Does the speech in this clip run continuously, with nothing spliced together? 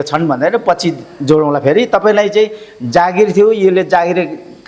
yes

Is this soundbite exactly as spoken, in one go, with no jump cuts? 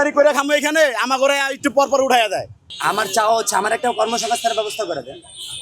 no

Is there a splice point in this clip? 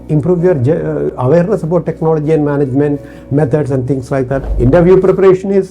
yes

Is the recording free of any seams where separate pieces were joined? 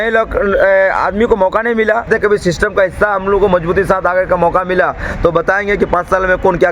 no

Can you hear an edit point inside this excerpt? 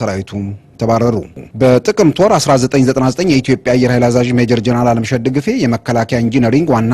yes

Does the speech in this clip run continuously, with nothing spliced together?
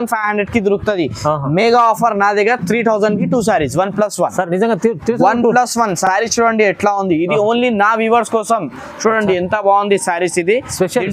yes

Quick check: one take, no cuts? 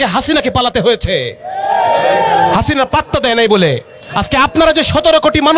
yes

